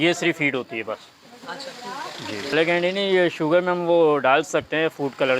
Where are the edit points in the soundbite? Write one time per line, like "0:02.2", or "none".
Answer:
0:02.5